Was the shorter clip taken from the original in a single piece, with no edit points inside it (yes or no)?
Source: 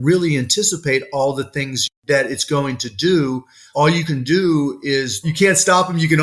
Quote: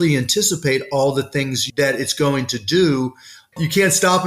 no